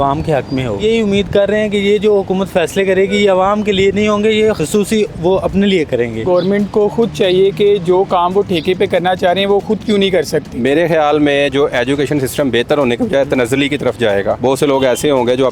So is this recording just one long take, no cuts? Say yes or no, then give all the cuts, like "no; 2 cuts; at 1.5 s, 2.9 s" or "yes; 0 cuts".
no; 5 cuts; at 0.8 s, 4.6 s, 6.2 s, 10.5 s, 14.4 s